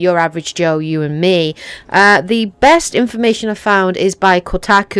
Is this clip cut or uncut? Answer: cut